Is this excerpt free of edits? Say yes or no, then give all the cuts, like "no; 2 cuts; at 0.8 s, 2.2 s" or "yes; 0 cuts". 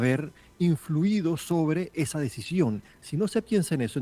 no; 1 cut; at 2.9 s